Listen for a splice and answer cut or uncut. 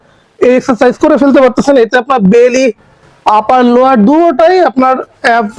uncut